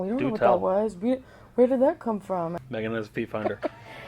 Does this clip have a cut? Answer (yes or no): yes